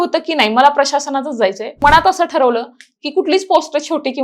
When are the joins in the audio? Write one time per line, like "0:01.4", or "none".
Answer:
0:01.8